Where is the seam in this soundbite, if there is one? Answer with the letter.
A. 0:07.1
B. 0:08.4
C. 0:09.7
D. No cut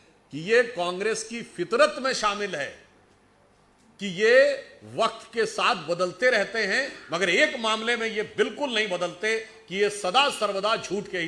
D